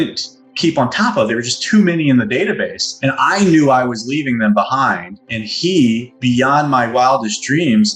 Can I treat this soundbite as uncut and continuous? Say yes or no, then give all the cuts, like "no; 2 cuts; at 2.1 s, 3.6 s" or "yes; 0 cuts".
yes; 0 cuts